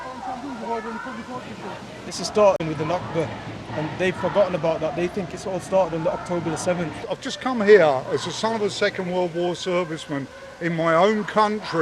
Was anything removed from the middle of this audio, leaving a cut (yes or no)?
yes